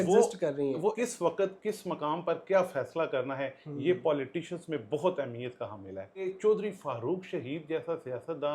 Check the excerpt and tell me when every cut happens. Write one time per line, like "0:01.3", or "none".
0:01.0
0:06.2